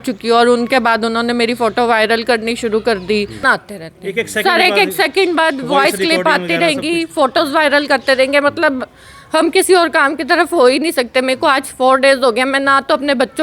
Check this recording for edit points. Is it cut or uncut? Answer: cut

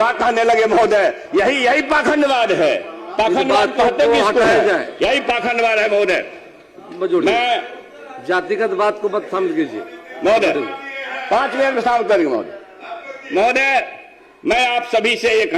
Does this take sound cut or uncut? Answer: uncut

